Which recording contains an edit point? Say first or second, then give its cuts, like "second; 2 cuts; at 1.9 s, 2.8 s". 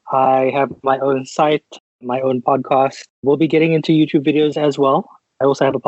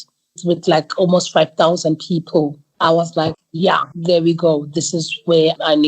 second; 2 cuts; at 2.6 s, 3.3 s